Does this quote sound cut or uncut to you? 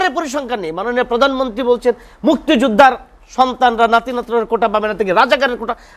uncut